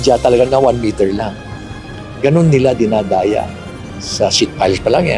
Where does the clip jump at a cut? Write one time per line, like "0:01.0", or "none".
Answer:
0:03.4